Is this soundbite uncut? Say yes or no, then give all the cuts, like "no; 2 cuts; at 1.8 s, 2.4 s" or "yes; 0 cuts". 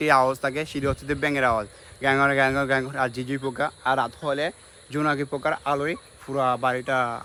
yes; 0 cuts